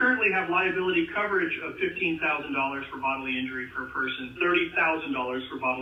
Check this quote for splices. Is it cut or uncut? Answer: uncut